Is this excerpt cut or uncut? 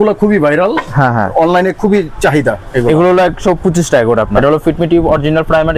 cut